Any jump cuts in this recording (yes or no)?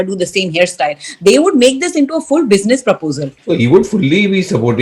yes